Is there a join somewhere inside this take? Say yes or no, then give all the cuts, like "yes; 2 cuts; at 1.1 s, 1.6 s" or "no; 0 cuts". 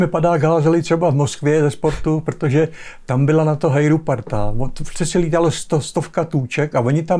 no; 0 cuts